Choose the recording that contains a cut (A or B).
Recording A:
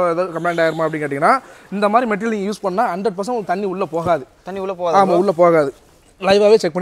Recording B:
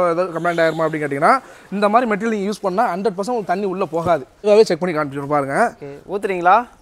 B